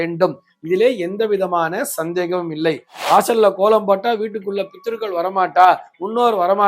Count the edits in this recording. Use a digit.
1